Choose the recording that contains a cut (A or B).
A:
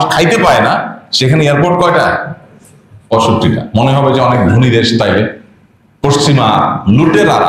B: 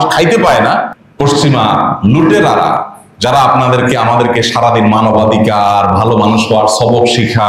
B